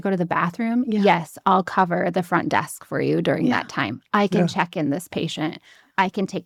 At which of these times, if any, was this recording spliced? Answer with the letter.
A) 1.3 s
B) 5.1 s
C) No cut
C